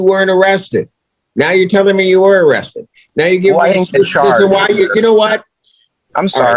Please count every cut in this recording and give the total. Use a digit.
0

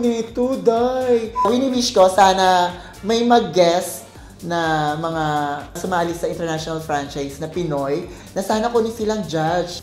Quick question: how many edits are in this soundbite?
1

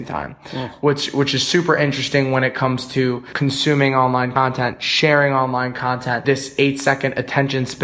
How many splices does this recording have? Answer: 3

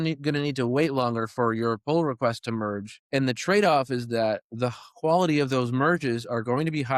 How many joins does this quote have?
0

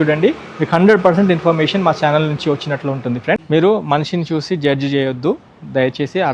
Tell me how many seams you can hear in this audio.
1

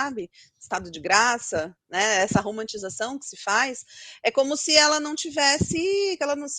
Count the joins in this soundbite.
0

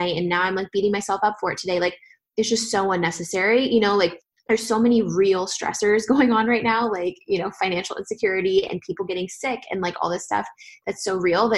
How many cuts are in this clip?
1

